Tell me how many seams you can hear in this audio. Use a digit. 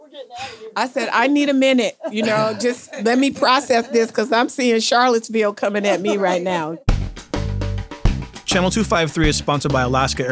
1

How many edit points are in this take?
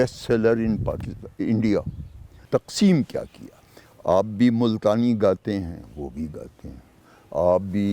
1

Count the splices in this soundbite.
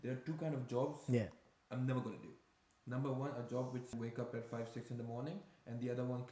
1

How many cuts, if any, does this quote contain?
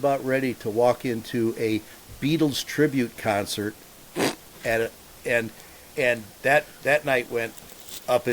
0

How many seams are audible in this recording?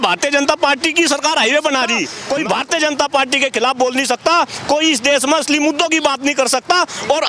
1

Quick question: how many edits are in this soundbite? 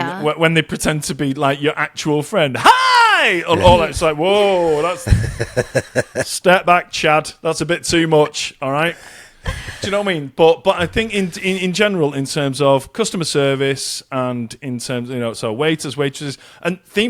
0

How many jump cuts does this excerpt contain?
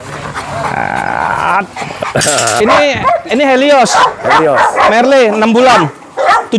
1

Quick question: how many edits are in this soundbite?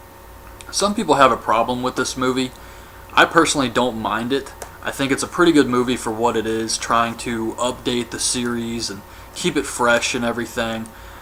0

